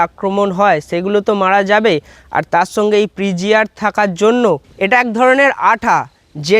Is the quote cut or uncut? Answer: cut